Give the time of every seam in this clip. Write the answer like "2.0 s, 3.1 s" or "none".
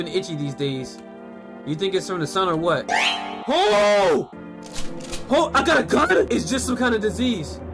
none